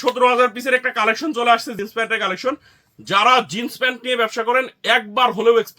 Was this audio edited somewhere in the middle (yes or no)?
yes